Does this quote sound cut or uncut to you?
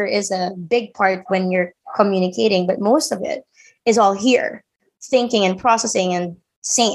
uncut